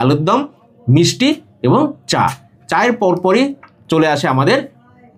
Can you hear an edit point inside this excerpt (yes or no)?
no